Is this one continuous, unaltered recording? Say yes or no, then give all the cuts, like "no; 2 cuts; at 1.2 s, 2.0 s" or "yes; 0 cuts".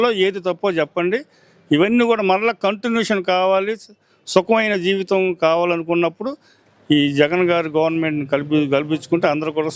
yes; 0 cuts